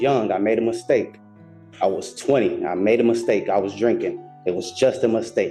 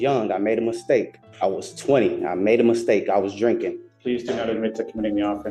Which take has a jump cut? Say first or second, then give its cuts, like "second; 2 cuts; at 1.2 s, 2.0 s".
second; 2 cuts; at 1.2 s, 3.8 s